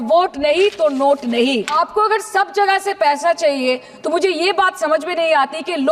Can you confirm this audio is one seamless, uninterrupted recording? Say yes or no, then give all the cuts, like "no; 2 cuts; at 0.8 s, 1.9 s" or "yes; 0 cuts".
no; 1 cut; at 1.7 s